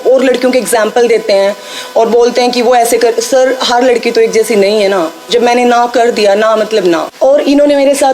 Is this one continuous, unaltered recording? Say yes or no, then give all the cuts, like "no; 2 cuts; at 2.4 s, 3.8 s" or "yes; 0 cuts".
no; 1 cut; at 7.1 s